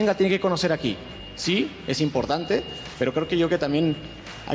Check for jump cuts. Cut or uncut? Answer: uncut